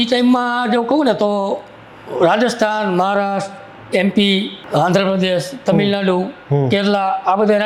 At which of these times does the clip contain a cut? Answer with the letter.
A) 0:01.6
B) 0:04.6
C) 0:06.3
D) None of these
B